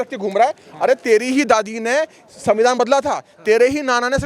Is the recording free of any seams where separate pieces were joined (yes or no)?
yes